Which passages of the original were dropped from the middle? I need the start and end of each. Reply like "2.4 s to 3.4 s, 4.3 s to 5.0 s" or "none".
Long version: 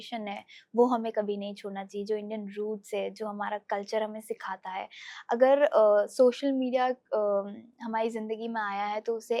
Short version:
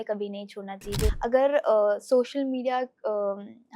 2.2 s to 5.2 s